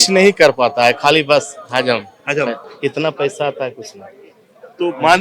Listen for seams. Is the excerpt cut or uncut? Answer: uncut